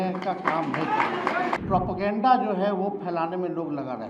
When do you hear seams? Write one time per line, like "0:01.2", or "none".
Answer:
0:01.6